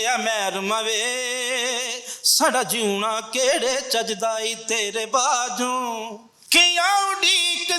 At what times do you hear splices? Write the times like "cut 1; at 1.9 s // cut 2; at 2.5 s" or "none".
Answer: cut 1; at 6.4 s